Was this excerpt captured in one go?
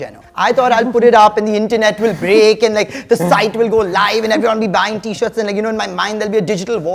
yes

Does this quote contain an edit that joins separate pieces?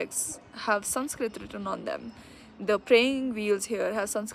no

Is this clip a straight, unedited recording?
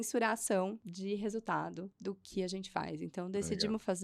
no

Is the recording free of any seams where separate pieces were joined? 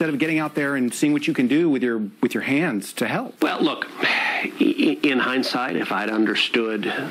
no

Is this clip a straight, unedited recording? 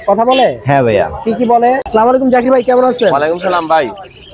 no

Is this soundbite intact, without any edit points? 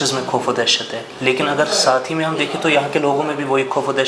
yes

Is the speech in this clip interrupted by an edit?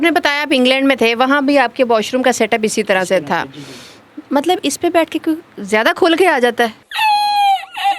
no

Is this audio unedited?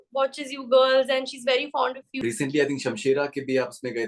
no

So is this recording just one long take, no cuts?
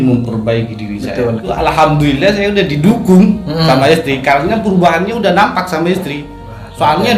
no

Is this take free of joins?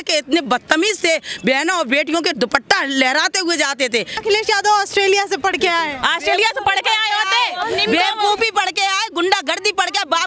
no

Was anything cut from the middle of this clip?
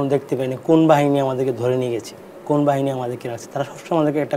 no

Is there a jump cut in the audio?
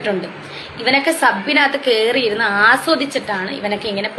no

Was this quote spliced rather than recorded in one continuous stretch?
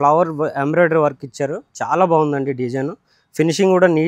no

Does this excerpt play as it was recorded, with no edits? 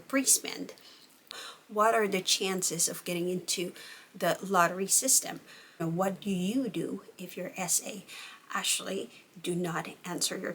no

